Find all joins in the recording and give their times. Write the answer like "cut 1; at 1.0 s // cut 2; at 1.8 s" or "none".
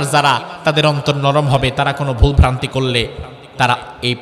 none